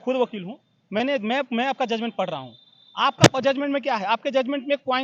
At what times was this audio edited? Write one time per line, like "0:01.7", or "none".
none